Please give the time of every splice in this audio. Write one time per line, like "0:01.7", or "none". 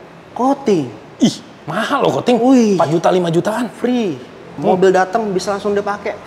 0:04.5